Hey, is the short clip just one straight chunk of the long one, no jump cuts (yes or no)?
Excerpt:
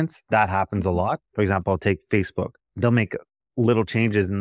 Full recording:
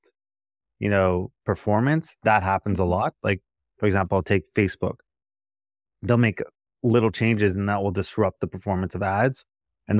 no